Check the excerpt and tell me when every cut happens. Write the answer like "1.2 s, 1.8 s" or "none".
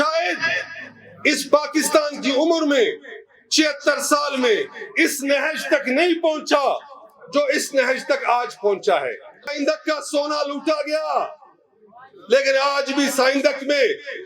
9.5 s